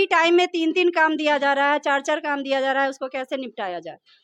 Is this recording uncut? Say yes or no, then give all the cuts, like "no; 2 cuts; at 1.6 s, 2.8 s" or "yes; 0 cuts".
yes; 0 cuts